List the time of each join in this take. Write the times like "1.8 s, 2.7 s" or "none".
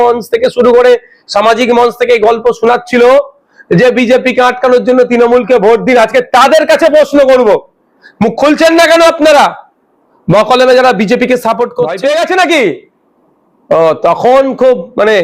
11.9 s